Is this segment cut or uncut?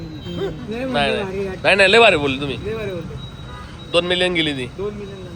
uncut